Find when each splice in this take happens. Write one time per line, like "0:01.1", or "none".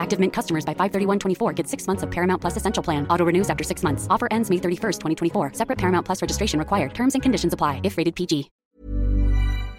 0:08.6

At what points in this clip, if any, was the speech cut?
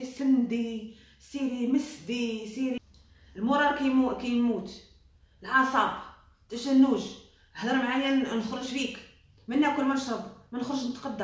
0:02.8

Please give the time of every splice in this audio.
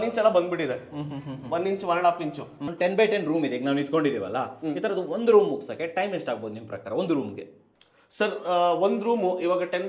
0:02.6

